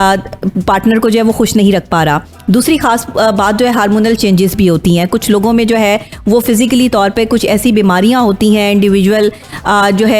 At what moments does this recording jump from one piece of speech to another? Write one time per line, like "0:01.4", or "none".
none